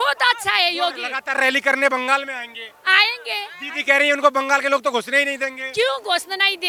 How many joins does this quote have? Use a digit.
0